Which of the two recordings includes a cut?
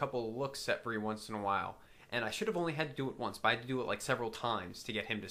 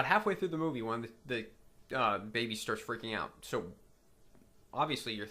second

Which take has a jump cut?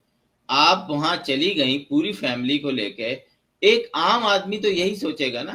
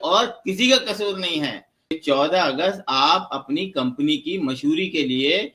second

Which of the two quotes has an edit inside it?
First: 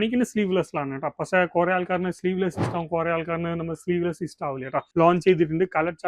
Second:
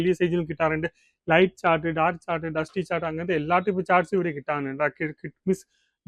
first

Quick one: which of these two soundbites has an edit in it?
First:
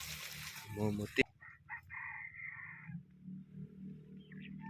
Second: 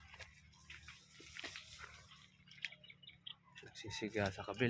first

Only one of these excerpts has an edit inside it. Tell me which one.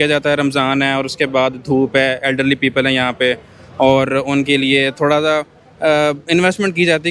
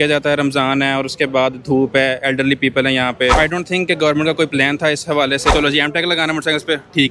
second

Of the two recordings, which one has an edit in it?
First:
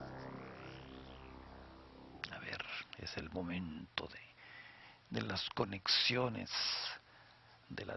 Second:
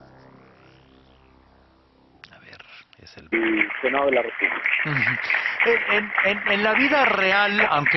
first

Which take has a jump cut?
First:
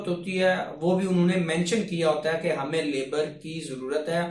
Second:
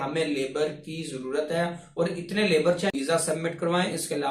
second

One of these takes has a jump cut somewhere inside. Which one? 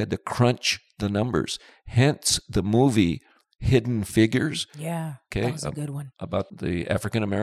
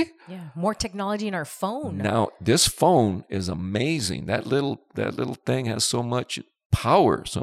first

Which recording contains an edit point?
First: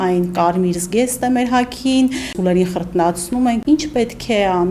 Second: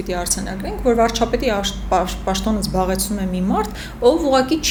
first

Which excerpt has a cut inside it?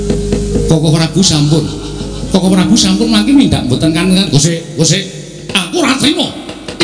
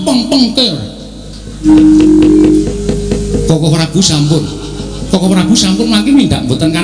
second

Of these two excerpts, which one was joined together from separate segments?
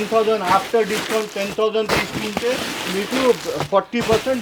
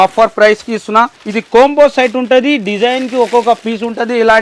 second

